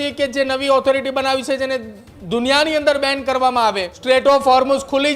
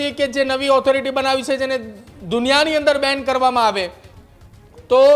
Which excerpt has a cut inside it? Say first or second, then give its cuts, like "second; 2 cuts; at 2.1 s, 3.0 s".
first; 1 cut; at 3.9 s